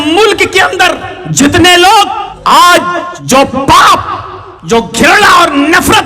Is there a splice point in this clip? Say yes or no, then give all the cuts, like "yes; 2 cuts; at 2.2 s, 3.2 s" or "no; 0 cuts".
yes; 3 cuts; at 1.2 s, 2.3 s, 3.1 s